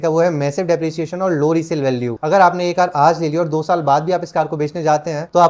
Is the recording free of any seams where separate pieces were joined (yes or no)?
yes